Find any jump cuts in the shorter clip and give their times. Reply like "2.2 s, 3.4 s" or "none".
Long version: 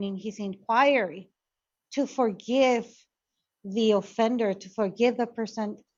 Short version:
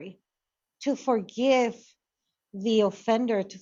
none